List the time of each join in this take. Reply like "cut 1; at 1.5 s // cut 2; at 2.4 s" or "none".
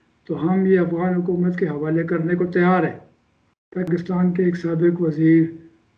cut 1; at 3.9 s